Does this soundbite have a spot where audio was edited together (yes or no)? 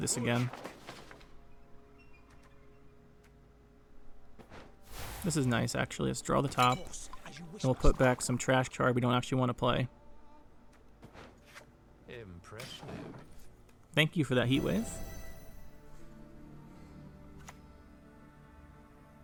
no